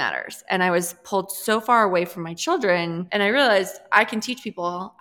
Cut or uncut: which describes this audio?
cut